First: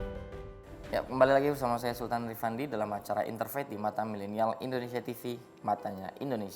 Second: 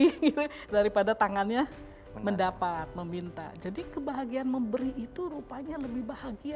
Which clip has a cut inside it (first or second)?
first